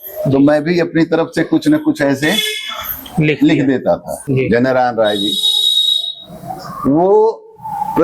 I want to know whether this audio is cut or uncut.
cut